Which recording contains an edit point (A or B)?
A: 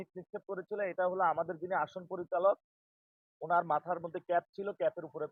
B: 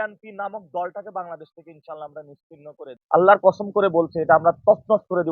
B